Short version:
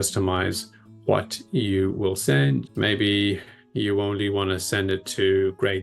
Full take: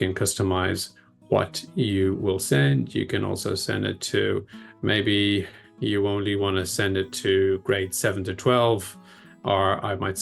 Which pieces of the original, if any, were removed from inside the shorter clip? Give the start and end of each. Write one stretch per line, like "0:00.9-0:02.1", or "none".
0:02.9-0:04.7